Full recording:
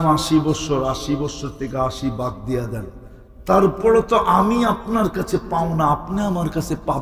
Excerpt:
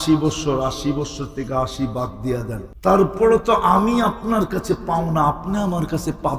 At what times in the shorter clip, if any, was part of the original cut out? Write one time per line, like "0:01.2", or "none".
0:02.6